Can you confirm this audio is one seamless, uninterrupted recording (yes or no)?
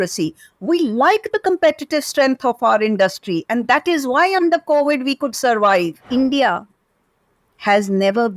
no